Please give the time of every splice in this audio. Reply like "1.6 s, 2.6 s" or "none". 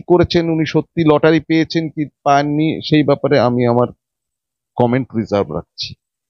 none